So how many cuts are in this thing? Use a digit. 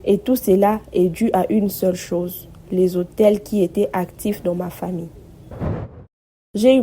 1